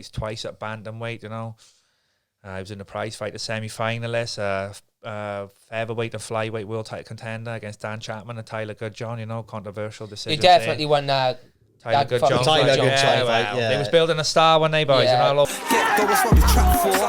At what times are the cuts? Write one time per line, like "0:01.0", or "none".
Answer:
0:15.5